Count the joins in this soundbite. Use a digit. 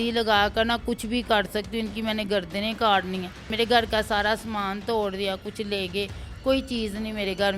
1